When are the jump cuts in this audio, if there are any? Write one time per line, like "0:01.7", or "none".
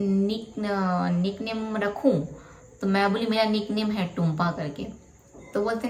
none